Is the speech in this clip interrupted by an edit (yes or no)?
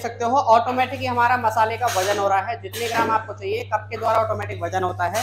no